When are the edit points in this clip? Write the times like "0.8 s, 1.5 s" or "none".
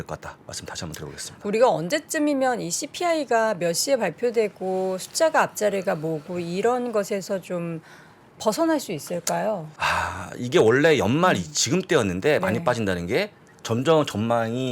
9.7 s